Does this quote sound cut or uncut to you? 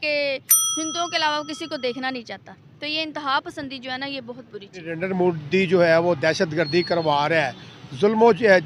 cut